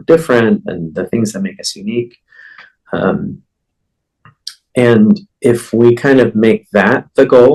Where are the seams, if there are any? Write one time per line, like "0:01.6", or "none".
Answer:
none